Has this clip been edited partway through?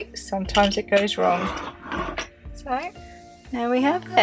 no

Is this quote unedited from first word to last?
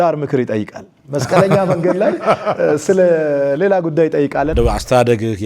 no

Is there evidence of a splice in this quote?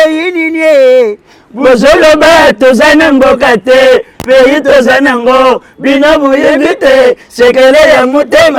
no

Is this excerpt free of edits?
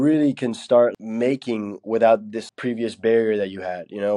no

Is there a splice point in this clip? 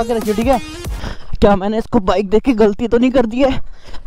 yes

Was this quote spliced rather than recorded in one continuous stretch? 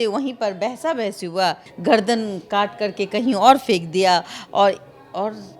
yes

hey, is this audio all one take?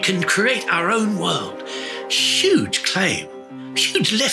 yes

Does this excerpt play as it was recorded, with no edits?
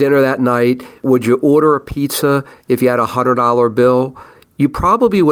yes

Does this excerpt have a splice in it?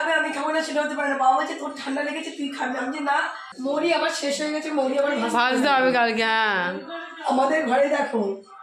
yes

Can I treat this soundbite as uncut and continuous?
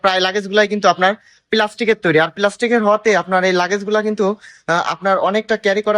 yes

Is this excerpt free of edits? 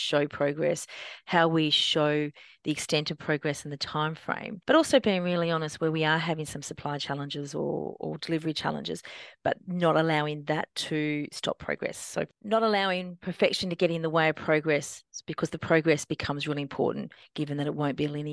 no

